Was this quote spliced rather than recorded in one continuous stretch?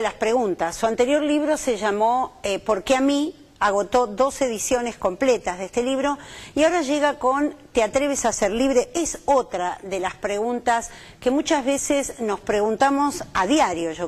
no; 0 cuts

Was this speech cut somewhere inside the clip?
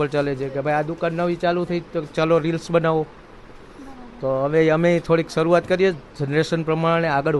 no; 0 cuts

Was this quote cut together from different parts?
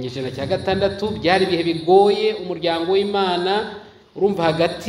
no; 0 cuts

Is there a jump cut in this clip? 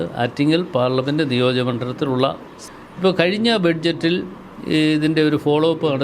yes; 1 cut; at 2.5 s

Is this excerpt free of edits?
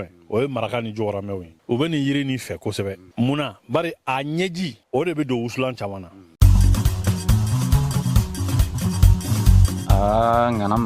no; 4 cuts; at 1.5 s, 3.0 s, 4.8 s, 6.2 s

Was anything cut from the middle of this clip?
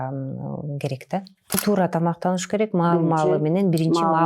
yes; 1 cut; at 1.6 s

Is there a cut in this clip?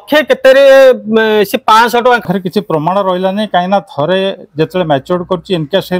yes; 1 cut; at 2.2 s

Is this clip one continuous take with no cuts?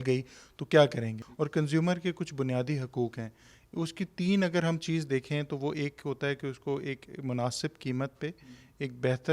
no; 1 cut; at 1.2 s

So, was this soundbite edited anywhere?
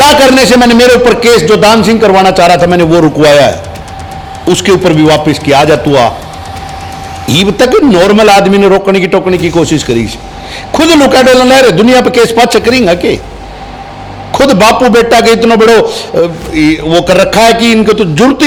no; 0 cuts

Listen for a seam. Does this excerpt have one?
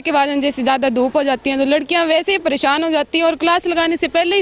no; 0 cuts

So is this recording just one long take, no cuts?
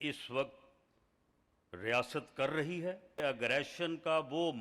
no; 1 cut; at 3.2 s

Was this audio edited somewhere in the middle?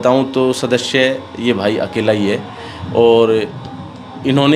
no; 0 cuts

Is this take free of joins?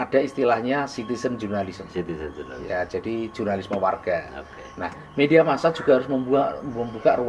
yes; 0 cuts

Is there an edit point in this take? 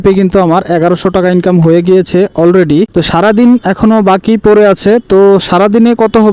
yes; 1 cut; at 2.9 s

